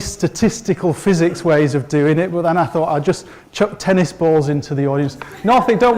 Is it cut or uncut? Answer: cut